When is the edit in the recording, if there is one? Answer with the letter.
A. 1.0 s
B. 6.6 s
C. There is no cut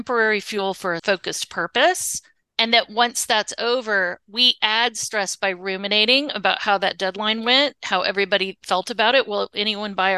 A